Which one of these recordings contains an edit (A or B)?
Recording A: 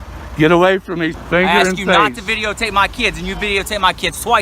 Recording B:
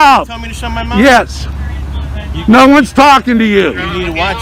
A